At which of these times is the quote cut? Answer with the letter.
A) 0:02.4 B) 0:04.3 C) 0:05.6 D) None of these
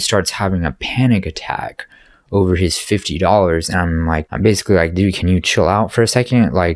B